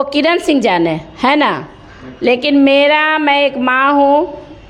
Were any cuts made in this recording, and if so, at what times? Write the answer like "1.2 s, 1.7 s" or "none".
none